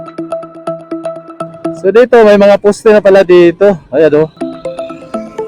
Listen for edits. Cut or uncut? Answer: cut